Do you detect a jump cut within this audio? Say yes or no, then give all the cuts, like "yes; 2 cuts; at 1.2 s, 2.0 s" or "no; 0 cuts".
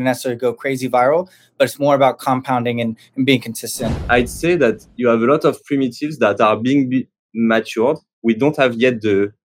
yes; 1 cut; at 4.0 s